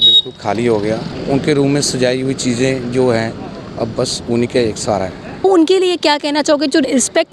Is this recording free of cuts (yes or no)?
no